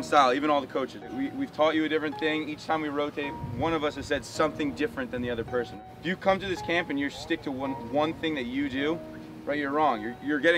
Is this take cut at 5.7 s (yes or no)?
yes